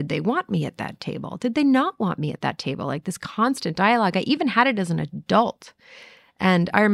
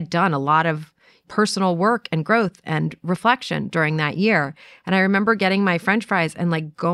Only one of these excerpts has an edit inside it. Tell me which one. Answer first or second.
second